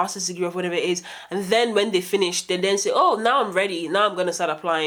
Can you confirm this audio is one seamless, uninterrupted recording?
yes; 0 cuts

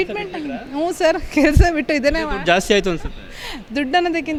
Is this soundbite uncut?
yes; 0 cuts

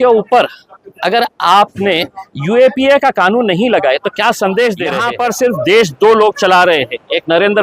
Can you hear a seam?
yes; 1 cut; at 5.1 s

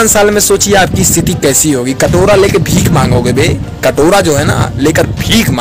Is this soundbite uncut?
yes; 0 cuts

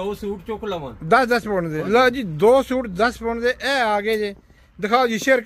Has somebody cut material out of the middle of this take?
yes; 1 cut; at 1.8 s

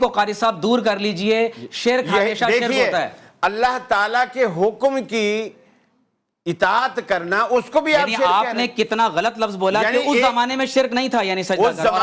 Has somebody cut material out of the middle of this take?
no; 0 cuts

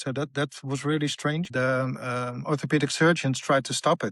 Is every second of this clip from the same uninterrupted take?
no; 1 cut; at 1.5 s

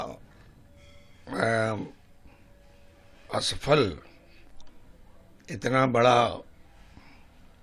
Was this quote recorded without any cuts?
yes; 0 cuts

